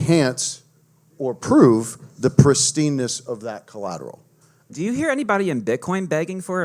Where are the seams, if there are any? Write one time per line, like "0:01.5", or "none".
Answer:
0:04.6